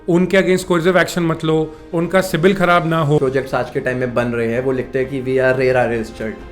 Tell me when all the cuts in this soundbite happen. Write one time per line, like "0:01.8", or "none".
0:03.2